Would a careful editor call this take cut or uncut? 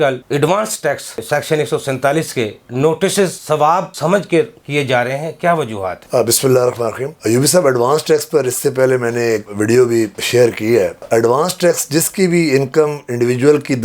uncut